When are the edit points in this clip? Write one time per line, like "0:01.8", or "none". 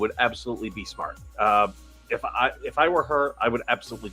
0:01.6